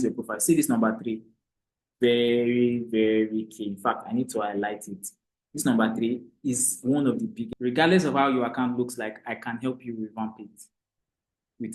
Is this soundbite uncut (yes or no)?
no